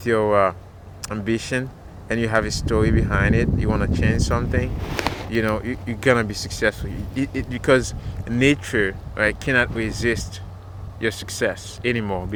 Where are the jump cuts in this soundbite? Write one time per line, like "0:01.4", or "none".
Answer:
none